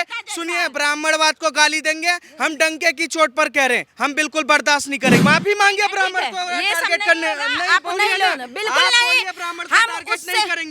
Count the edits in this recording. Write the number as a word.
one